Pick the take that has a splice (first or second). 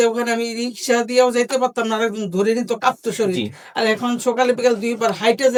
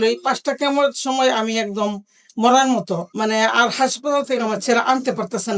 second